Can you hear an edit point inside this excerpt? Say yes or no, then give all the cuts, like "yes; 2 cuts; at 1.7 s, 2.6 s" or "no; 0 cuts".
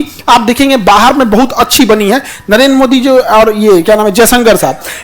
no; 0 cuts